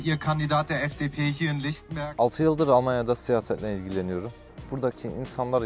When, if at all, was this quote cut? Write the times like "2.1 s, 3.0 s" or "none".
1.9 s, 4.4 s